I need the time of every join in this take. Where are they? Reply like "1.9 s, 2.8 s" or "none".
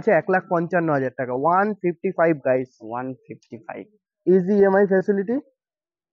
none